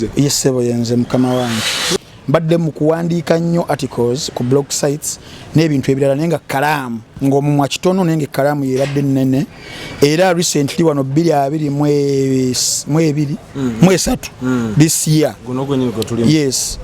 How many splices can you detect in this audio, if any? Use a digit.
1